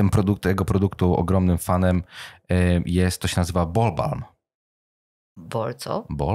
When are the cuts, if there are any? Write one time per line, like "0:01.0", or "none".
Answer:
none